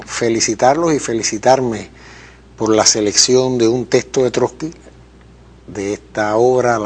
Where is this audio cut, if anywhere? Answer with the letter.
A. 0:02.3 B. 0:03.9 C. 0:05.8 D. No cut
C